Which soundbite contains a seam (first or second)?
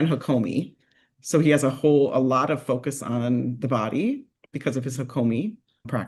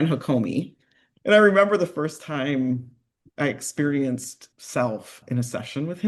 second